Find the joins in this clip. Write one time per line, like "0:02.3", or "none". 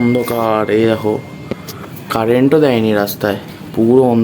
none

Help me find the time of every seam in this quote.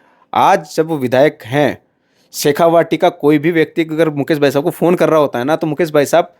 none

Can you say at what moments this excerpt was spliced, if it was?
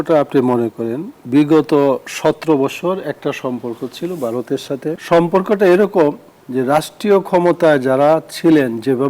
0:01.1
0:05.0

